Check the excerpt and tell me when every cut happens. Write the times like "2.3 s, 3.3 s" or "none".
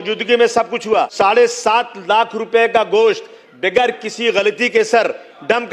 1.1 s